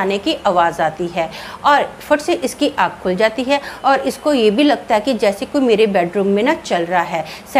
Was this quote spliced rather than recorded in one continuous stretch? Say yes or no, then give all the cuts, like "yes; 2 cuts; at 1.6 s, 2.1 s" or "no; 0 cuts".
no; 0 cuts